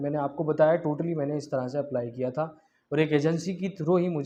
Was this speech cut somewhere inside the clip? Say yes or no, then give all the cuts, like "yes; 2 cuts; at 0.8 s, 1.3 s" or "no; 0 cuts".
no; 0 cuts